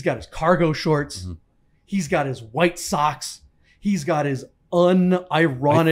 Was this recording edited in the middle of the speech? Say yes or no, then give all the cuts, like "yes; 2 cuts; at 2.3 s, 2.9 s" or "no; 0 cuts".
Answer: no; 0 cuts